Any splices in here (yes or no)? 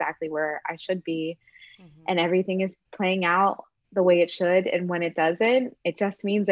no